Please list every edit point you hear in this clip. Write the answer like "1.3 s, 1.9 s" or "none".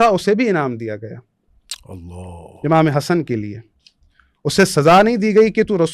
none